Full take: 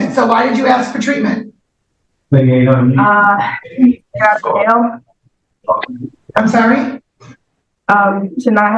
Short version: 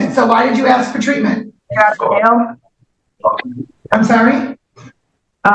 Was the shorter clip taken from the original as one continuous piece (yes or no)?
no